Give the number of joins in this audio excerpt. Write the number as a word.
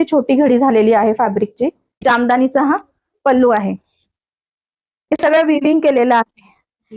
one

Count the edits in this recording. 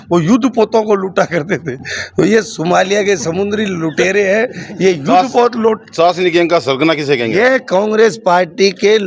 zero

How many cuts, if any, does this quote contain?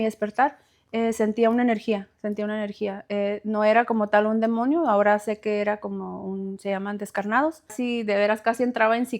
one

